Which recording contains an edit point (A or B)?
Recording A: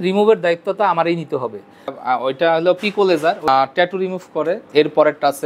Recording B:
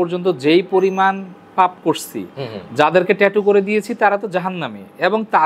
A